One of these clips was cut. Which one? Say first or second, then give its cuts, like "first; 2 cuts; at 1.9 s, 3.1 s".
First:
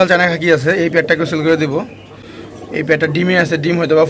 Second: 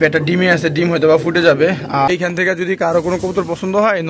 second; 1 cut; at 2.2 s